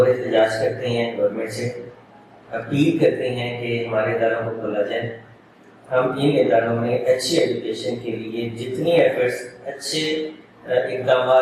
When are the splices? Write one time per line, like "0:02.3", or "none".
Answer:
none